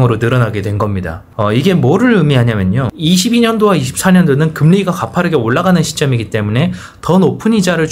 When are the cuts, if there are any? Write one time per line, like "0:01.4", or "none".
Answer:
0:02.9